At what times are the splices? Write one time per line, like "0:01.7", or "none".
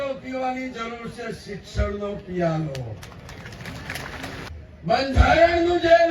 0:04.5